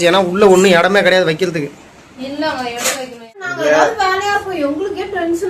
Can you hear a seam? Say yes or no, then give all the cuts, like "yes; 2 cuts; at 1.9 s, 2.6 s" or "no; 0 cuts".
yes; 1 cut; at 3.5 s